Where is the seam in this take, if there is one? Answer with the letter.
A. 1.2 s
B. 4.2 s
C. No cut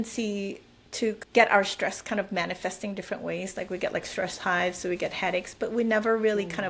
A